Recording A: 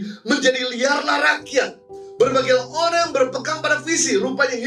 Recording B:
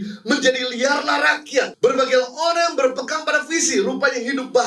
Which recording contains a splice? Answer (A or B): B